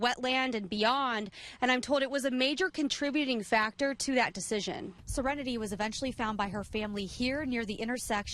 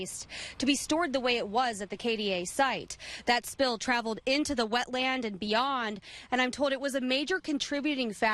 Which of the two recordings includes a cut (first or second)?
first